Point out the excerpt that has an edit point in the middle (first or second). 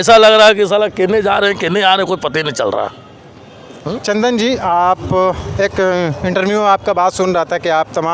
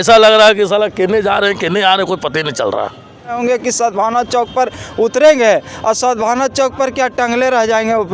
second